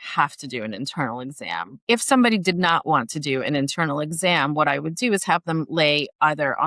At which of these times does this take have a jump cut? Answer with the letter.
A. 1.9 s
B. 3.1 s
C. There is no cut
A